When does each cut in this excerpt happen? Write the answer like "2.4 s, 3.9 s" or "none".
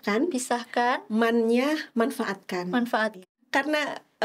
3.4 s